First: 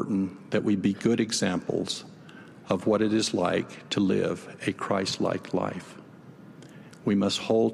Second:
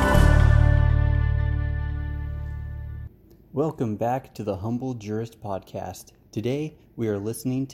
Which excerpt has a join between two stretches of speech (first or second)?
second